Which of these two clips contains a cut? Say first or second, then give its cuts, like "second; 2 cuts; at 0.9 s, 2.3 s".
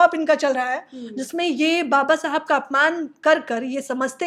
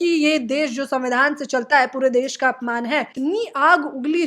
second; 1 cut; at 3.1 s